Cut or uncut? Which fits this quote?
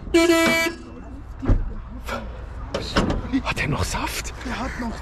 uncut